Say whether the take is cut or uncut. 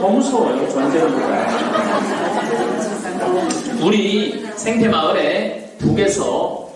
uncut